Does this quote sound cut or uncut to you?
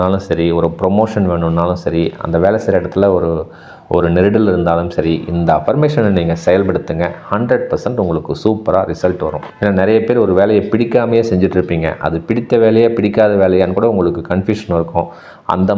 uncut